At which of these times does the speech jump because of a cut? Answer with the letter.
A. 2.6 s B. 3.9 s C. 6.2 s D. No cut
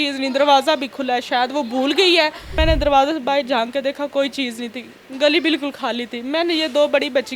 A